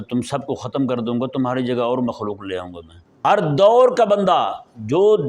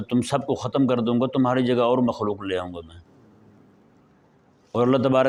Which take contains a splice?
first; 1 cut; at 3.2 s

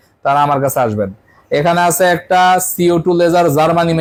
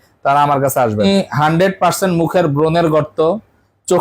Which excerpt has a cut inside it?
second; 1 cut; at 1.0 s

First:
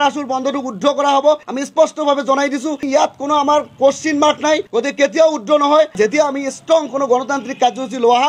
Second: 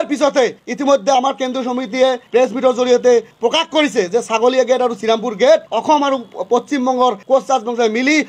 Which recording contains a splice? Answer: first; 4 cuts; at 1.4 s, 2.8 s, 4.7 s, 6.0 s

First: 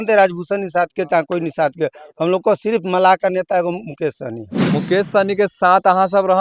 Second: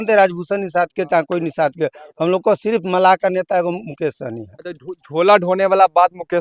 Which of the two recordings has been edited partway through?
first; 1 cut; at 4.6 s

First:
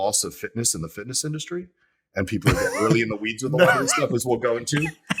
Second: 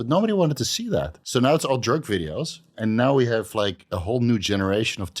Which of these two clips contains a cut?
second; 2 cuts; at 1.2 s, 2.8 s

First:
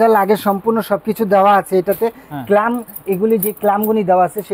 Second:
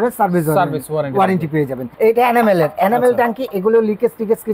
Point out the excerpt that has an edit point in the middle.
second; 1 cut; at 1.9 s

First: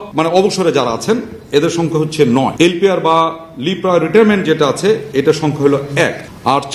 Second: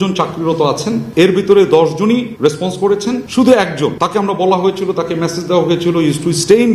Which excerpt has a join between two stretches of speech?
second; 4 cuts; at 1.1 s, 2.3 s, 3.3 s, 4.0 s

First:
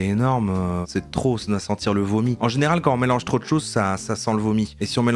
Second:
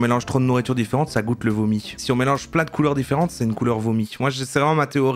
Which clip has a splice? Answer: first; 2 cuts; at 0.8 s, 2.4 s

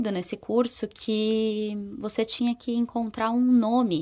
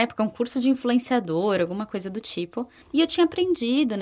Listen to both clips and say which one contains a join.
second; 1 cut; at 2.8 s

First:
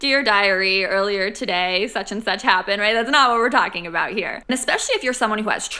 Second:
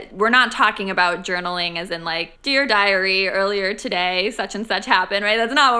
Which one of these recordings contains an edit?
first; 1 cut; at 4.5 s

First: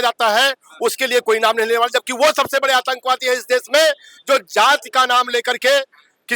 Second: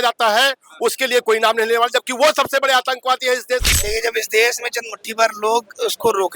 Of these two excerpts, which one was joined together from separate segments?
second; 1 cut; at 3.6 s

